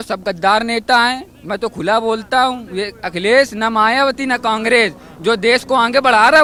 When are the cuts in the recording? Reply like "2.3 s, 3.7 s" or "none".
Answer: none